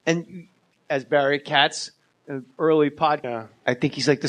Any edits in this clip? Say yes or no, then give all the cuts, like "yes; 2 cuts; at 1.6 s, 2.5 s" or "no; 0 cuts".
no; 0 cuts